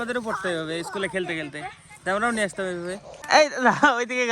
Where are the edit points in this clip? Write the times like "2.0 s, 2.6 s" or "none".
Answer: 3.1 s